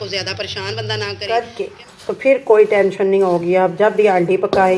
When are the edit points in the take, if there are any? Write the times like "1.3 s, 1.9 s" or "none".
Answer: 1.2 s